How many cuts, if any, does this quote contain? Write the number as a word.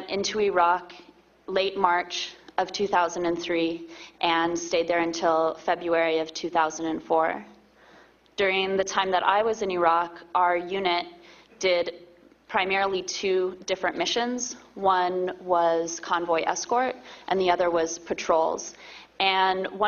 one